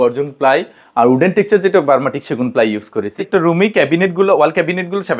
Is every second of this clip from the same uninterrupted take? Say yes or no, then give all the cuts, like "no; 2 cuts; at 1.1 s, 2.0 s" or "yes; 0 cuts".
no; 1 cut; at 3.1 s